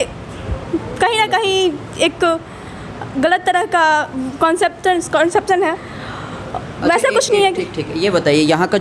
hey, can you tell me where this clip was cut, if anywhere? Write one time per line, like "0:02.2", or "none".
none